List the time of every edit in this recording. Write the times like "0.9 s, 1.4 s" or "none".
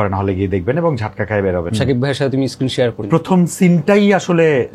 1.7 s, 3.0 s